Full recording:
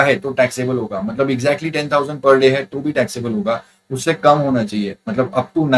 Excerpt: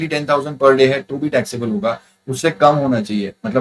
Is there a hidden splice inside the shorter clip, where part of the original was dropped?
no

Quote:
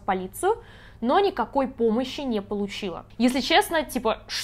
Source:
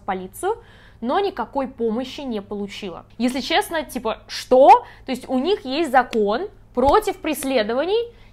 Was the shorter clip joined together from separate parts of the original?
no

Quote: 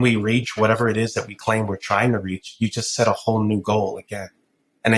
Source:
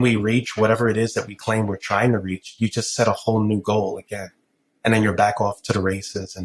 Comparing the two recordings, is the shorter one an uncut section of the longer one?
yes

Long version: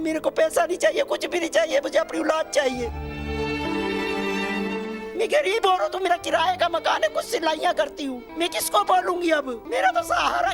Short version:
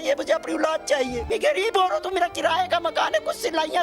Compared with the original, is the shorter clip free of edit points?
no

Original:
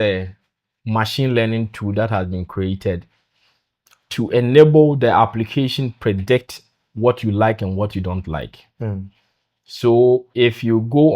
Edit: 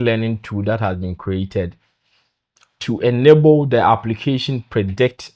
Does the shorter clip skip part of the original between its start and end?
no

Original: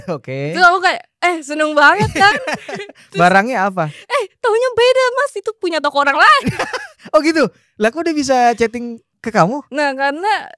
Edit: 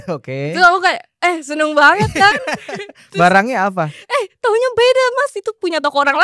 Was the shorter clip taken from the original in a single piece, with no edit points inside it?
yes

